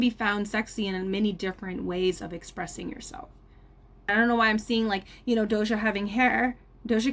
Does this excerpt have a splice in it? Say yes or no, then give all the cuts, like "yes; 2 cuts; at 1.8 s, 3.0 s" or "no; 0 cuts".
yes; 1 cut; at 4.1 s